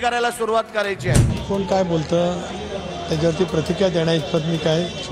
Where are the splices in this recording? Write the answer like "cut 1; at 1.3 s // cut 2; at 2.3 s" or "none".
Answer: cut 1; at 1.3 s